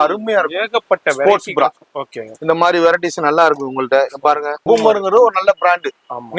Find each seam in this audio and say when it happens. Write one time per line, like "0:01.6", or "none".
0:04.5